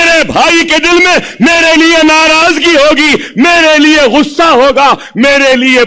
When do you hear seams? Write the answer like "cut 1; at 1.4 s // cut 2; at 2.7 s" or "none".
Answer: none